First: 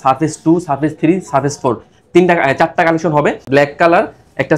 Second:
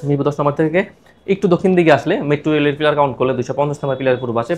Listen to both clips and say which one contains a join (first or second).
first